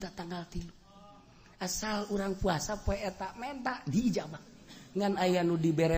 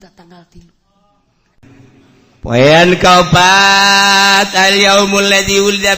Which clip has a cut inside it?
second; 1 cut; at 1.6 s

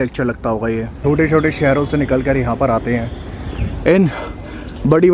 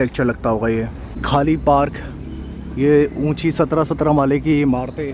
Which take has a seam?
first; 1 cut; at 0.9 s

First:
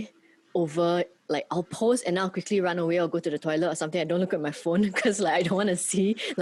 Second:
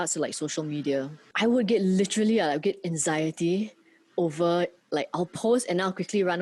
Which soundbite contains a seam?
second; 1 cut; at 1.2 s

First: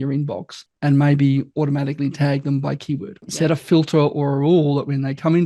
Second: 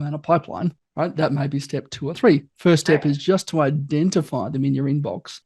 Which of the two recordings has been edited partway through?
first; 1 cut; at 3.2 s

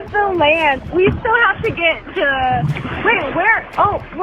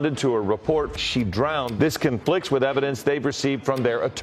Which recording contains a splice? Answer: first; 2 cuts; at 0.8 s, 2.9 s

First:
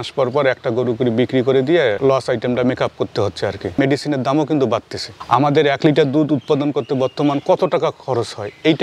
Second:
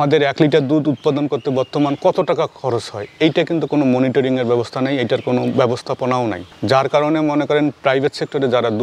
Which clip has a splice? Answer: first; 1 cut; at 3.6 s

